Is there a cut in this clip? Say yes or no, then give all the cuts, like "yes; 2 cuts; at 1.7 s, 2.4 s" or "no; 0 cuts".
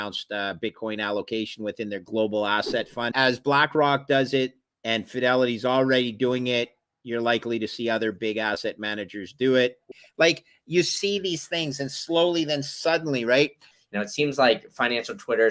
yes; 4 cuts; at 2.0 s, 3.1 s, 9.9 s, 13.8 s